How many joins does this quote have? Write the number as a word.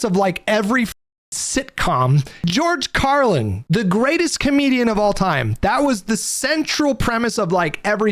two